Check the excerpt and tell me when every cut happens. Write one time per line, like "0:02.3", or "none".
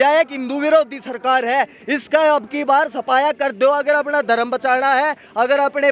none